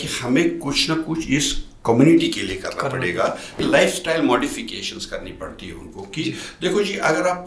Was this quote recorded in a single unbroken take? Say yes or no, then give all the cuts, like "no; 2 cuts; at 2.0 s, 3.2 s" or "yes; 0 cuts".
no; 1 cut; at 3.5 s